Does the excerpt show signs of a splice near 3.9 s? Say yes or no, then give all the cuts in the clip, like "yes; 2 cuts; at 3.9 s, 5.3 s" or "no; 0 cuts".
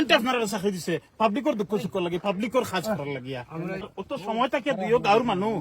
yes; 1 cut; at 3.9 s